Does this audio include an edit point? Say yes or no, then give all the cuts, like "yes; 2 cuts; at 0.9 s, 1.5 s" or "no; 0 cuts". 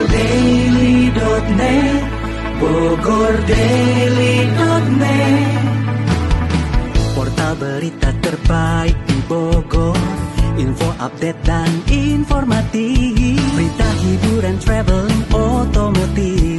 no; 0 cuts